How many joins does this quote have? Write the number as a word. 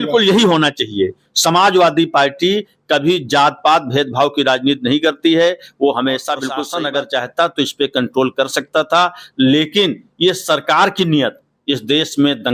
one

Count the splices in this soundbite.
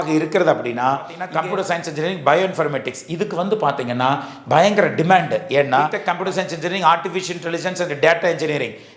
two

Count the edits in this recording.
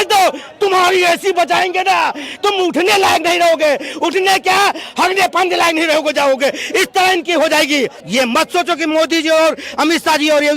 one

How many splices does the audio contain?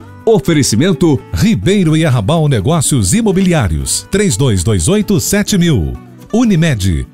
one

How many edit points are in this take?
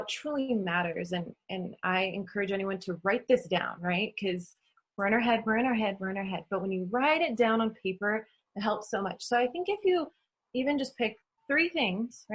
zero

